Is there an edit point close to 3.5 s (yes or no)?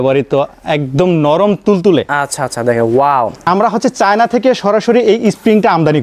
yes